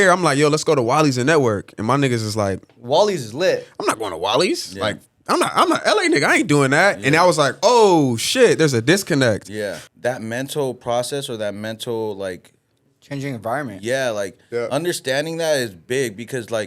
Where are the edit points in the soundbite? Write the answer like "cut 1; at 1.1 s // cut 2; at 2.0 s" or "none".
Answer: cut 1; at 9.8 s